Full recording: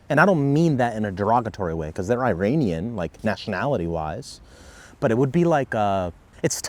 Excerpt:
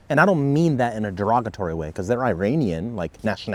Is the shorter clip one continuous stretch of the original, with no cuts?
yes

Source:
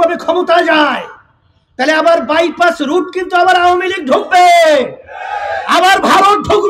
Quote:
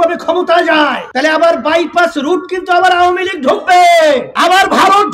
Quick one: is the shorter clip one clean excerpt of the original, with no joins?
no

